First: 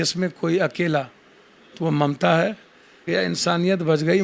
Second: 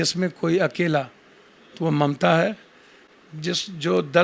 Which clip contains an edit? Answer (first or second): first